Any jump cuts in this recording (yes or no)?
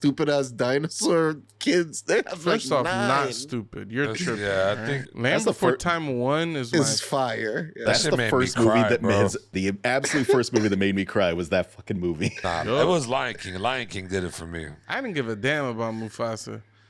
yes